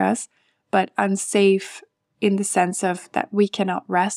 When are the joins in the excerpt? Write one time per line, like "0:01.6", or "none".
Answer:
none